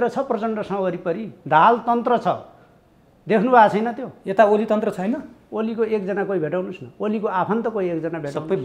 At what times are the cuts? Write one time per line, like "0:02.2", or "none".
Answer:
none